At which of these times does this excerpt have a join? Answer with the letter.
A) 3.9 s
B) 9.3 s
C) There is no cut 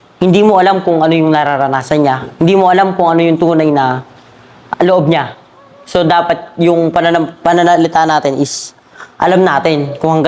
C